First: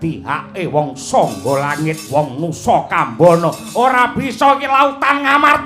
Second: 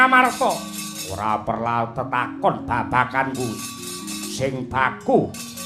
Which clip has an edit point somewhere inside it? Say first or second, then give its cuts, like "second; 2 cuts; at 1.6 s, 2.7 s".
first; 1 cut; at 2.0 s